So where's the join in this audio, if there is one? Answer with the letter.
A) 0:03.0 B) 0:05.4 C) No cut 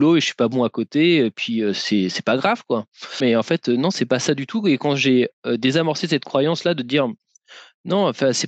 C